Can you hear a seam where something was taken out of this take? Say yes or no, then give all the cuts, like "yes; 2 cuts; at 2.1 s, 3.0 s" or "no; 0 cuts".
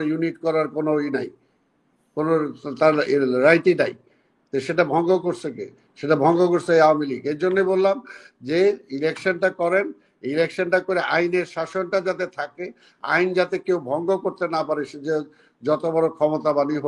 no; 0 cuts